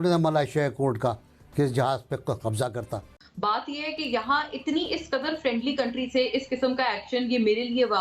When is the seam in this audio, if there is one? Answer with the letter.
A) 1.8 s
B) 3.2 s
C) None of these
B